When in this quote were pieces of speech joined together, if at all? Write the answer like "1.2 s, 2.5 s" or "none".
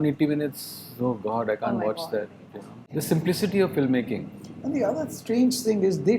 none